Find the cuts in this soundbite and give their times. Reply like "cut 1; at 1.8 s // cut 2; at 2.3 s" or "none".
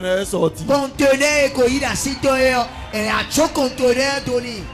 none